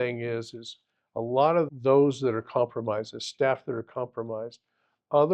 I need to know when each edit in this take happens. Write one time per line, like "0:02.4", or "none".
0:01.7